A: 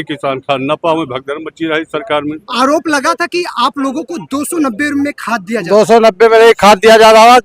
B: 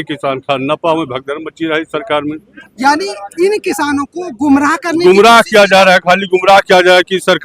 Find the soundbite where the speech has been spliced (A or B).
A